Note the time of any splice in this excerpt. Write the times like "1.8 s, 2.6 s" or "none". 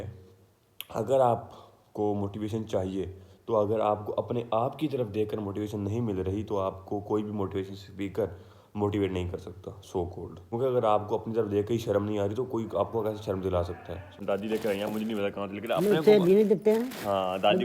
10.4 s, 14.2 s